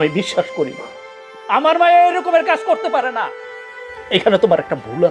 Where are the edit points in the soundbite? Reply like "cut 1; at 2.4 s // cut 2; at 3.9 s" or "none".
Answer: none